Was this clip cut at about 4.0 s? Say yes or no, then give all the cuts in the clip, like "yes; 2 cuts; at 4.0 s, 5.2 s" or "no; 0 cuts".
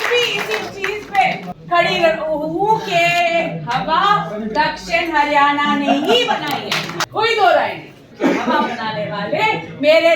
no; 3 cuts; at 1.5 s, 6.9 s, 8.1 s